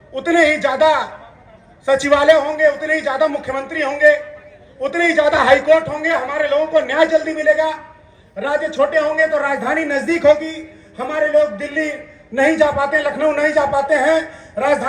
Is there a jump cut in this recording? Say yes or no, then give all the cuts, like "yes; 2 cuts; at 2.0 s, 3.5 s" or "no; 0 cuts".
no; 0 cuts